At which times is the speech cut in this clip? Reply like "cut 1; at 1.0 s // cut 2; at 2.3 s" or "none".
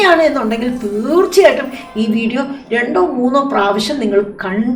none